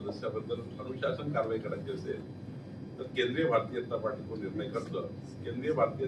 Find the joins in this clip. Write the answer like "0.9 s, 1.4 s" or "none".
none